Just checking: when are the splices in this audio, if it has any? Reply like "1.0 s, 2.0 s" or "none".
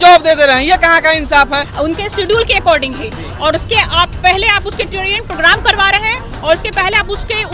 1.7 s

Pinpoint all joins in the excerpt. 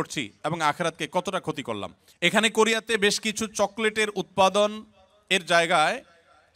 2.0 s

